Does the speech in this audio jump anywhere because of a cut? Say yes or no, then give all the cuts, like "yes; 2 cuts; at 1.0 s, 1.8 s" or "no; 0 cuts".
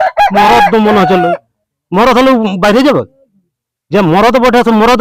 no; 0 cuts